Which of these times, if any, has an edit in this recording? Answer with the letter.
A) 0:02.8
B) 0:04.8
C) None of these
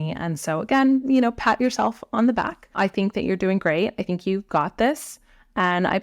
A